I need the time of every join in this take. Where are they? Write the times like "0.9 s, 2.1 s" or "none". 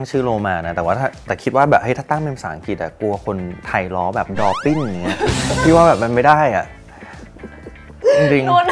none